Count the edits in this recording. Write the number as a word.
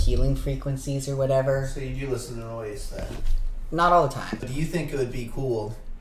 one